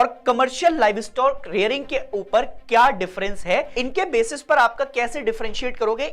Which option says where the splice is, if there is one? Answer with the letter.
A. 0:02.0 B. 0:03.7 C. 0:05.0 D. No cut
B